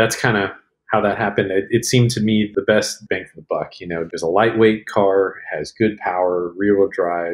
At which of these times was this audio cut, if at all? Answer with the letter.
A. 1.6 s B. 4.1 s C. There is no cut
B